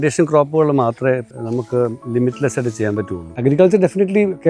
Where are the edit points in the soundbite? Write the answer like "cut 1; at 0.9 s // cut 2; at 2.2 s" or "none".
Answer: cut 1; at 1.3 s // cut 2; at 3.2 s